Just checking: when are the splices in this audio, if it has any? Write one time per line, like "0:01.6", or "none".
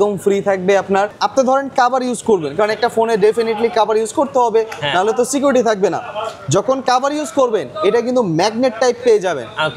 0:01.1